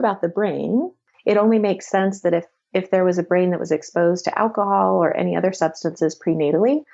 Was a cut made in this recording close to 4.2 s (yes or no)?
no